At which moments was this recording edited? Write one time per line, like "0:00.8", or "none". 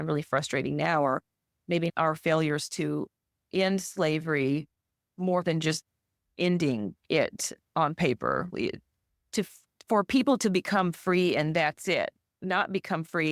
0:01.9